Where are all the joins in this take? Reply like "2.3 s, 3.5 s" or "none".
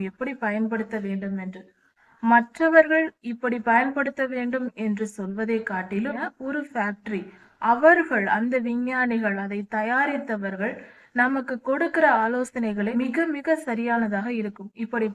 6.3 s, 12.9 s